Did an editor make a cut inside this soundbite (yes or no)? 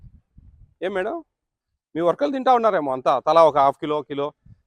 no